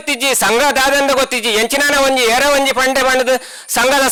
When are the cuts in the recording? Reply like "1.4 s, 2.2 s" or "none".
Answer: none